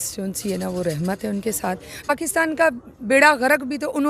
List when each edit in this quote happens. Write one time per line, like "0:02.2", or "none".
0:02.1